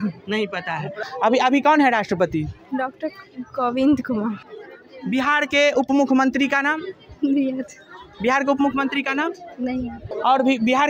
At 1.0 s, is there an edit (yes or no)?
yes